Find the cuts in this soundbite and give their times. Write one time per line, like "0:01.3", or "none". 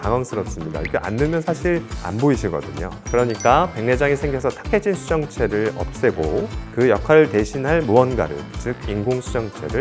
0:02.9